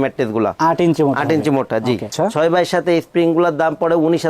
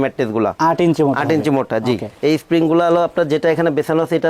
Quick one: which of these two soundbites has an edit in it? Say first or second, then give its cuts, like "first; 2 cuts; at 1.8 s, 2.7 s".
first; 1 cut; at 2.1 s